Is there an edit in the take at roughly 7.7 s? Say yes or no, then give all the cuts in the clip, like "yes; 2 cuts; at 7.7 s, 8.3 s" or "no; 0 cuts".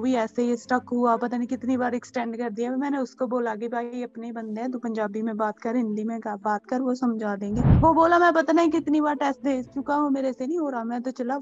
yes; 1 cut; at 7.7 s